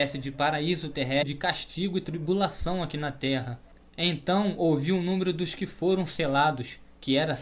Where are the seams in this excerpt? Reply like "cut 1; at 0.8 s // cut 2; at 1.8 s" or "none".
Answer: none